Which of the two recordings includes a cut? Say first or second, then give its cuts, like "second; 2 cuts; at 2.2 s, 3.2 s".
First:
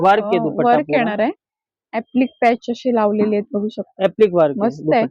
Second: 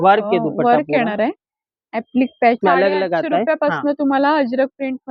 second; 1 cut; at 2.6 s